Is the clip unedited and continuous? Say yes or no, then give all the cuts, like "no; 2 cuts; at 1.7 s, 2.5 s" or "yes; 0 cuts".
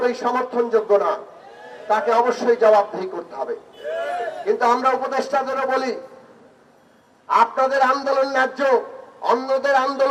yes; 0 cuts